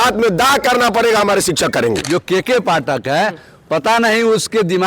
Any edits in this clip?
yes; 1 cut; at 2.0 s

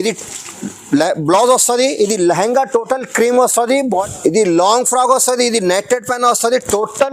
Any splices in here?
yes; 1 cut; at 3.9 s

